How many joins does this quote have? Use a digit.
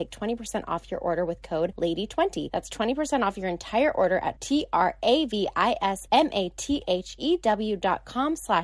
3